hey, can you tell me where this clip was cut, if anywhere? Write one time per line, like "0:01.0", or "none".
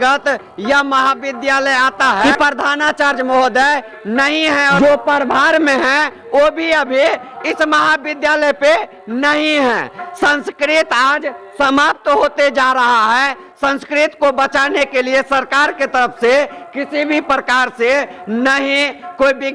0:02.2
0:04.7